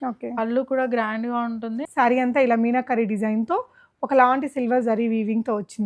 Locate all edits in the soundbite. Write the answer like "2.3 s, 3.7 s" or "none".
1.8 s